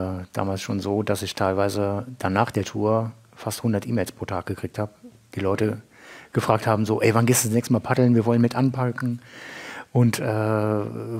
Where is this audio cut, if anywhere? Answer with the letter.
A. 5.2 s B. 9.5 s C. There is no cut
C